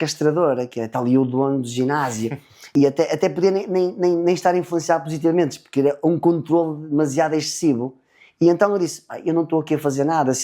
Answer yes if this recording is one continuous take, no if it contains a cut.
no